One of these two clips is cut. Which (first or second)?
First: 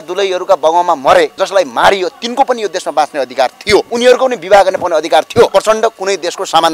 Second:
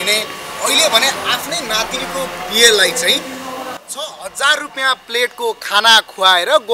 first